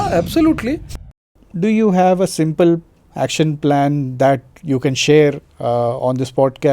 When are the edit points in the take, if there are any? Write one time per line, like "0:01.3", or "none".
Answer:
0:01.3